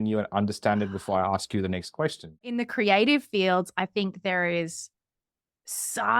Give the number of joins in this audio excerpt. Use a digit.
1